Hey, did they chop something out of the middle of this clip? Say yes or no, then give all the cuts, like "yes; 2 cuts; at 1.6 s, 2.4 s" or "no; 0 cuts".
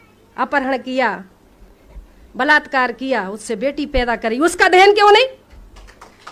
no; 0 cuts